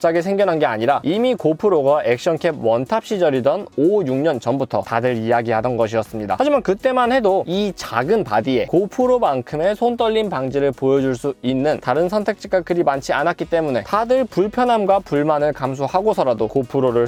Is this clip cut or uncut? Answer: uncut